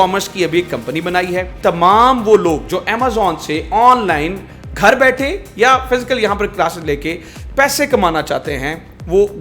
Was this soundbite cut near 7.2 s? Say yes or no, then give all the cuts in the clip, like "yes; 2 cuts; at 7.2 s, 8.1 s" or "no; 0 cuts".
no; 1 cut; at 1.5 s